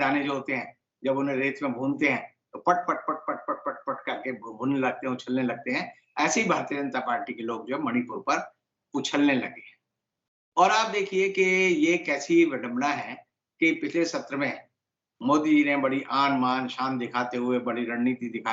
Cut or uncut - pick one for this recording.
uncut